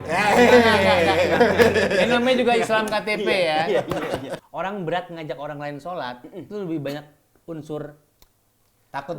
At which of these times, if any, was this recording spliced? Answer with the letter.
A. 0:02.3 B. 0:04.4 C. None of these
B